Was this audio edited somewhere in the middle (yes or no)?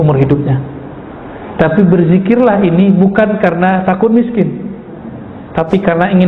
no